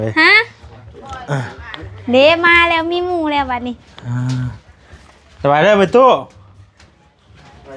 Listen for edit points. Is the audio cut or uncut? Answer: uncut